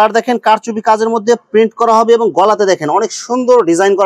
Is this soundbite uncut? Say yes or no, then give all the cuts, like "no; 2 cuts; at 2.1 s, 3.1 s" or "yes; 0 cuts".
yes; 0 cuts